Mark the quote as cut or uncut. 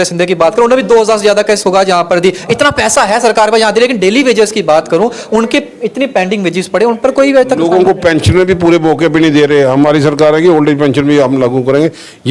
uncut